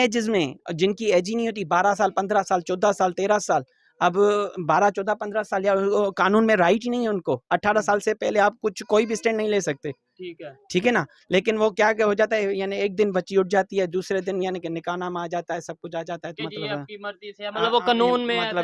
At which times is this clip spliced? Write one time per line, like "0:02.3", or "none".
none